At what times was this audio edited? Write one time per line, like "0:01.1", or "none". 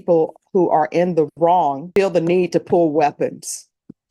0:01.8